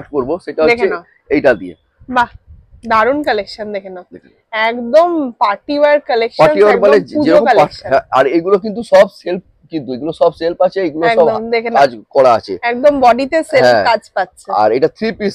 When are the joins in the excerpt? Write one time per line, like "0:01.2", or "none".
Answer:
none